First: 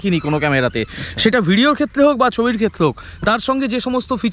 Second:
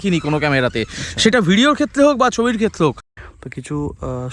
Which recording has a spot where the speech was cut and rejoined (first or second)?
second